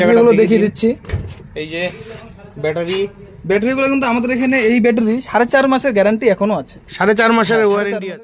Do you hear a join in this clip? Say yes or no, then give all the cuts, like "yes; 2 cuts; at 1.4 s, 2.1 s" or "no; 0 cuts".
no; 0 cuts